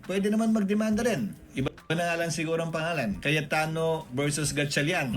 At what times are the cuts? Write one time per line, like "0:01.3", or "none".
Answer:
0:03.7